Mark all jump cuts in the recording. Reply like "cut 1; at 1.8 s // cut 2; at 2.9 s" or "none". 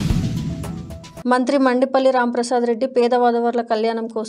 cut 1; at 1.0 s